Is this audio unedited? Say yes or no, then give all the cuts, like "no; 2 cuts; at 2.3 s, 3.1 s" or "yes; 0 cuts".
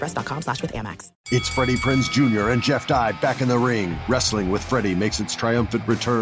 no; 1 cut; at 1.1 s